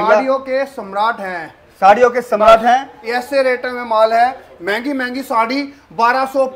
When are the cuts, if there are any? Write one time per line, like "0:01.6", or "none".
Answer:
none